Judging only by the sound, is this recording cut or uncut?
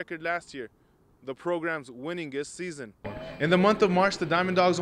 cut